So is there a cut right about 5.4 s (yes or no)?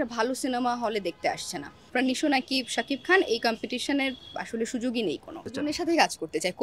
yes